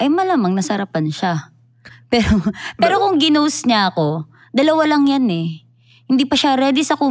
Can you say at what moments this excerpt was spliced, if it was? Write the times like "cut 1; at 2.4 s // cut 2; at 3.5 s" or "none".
none